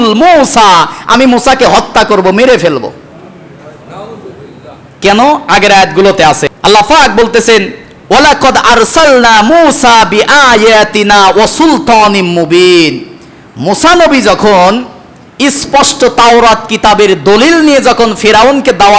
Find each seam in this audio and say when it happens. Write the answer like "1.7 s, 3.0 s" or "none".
6.5 s